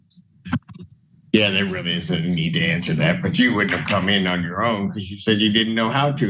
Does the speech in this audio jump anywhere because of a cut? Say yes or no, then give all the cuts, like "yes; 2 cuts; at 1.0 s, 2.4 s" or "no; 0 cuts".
no; 0 cuts